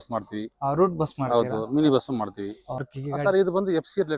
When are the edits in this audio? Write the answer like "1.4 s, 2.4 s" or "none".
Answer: 2.9 s